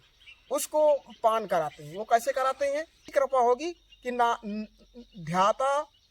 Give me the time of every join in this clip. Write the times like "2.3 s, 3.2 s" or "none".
3.1 s